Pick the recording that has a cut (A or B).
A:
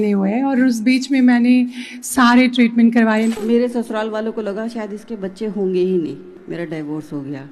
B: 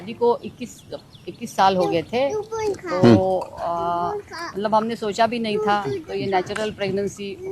A